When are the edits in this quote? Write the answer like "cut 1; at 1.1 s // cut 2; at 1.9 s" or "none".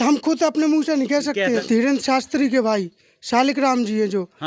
cut 1; at 1.4 s